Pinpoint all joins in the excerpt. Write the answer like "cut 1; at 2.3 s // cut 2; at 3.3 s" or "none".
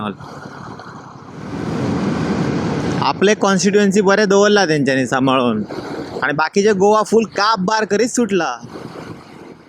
cut 1; at 1.5 s